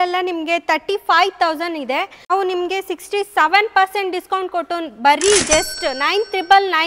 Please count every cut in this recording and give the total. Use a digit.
0